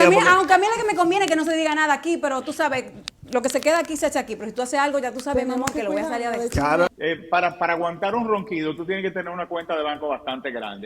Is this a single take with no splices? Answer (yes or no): no